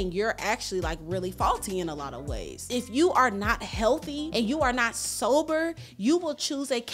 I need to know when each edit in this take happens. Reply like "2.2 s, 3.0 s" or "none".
2.6 s, 4.2 s